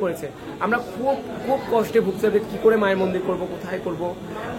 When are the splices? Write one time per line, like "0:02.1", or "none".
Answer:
none